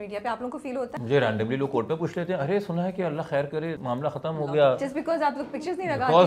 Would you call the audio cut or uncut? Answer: cut